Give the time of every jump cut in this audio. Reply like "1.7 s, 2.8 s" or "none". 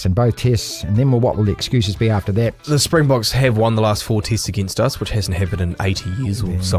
2.6 s